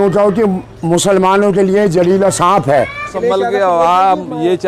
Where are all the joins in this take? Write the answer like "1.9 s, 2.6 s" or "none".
3.1 s

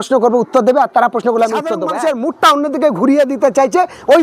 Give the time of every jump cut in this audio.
1.8 s

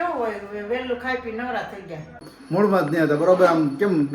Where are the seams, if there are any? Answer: 2.3 s

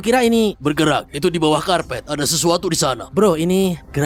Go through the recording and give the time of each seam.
3.0 s

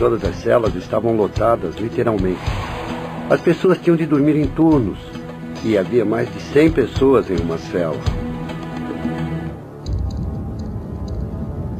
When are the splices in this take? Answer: 9.2 s

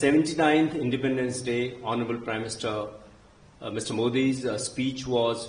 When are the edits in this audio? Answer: none

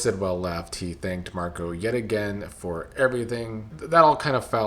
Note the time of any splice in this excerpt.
3.7 s

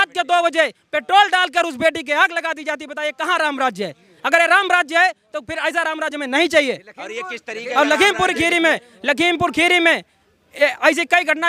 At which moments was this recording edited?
none

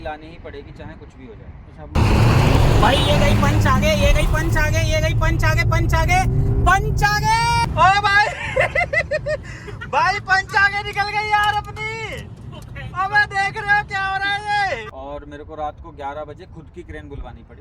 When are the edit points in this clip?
1.9 s, 7.7 s, 14.7 s

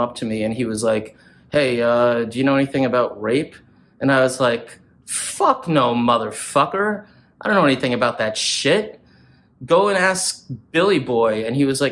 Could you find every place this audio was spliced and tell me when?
none

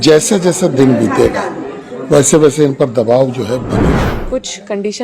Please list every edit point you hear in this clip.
4.0 s

